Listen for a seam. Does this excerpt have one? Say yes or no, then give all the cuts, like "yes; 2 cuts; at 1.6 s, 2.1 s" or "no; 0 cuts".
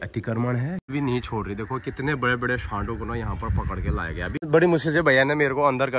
yes; 2 cuts; at 0.9 s, 4.4 s